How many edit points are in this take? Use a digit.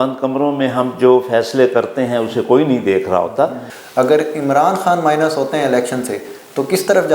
1